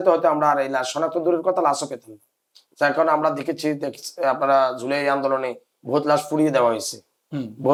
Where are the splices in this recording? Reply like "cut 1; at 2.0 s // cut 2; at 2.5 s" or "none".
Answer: none